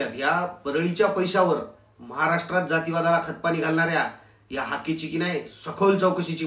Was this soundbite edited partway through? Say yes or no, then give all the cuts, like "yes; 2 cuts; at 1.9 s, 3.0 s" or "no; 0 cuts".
no; 0 cuts